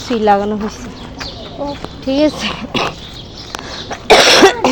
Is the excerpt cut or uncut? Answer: uncut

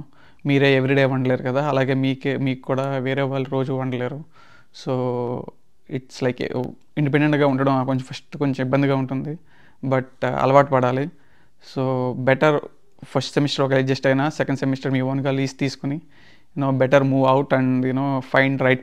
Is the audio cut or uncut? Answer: uncut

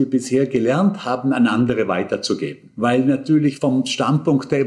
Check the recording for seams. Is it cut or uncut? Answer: cut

